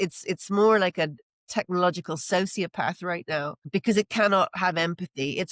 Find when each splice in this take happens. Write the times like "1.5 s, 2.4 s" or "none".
none